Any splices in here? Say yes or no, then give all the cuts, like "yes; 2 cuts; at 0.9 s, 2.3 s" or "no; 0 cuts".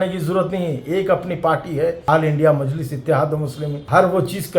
no; 0 cuts